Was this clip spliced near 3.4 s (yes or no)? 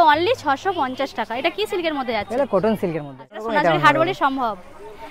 yes